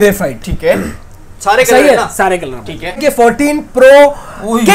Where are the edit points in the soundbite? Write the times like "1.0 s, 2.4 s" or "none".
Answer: 3.0 s